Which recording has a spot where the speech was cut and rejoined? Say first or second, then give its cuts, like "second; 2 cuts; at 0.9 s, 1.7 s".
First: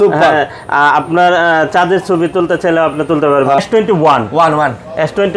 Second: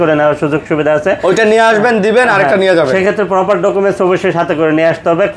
first; 1 cut; at 3.6 s